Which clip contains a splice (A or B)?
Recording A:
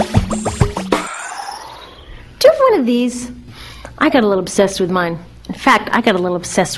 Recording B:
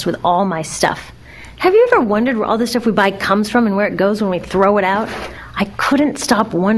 B